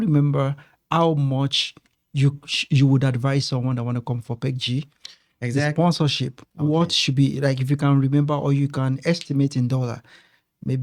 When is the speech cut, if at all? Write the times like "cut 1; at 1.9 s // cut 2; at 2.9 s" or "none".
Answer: none

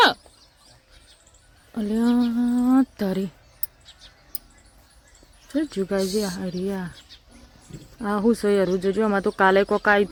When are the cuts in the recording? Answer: none

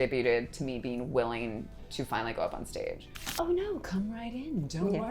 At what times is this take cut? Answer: cut 1; at 3.2 s

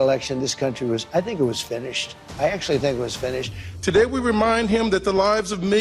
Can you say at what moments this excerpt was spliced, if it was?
cut 1; at 3.7 s

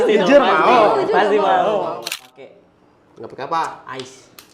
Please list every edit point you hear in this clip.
cut 1; at 1.9 s

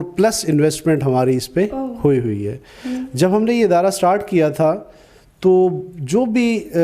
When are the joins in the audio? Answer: none

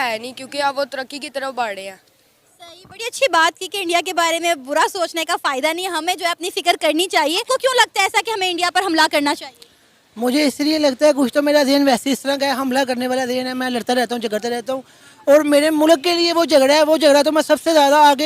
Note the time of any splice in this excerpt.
cut 1; at 7.4 s

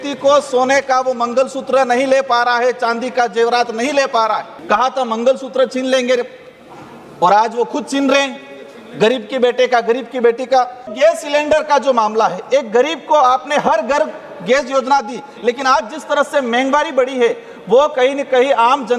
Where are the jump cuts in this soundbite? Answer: cut 1; at 4.5 s // cut 2; at 10.9 s

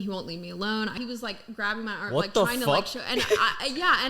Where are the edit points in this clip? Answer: cut 1; at 0.9 s

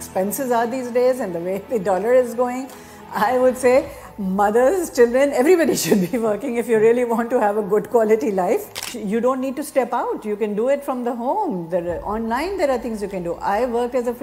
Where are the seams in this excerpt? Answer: cut 1; at 8.9 s

